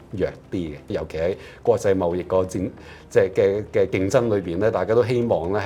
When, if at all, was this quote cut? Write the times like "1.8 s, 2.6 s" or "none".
0.9 s